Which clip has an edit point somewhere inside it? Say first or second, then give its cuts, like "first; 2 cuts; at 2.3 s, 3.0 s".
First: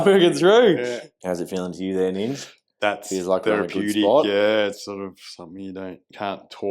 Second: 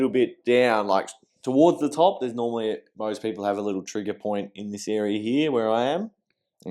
first; 1 cut; at 1.1 s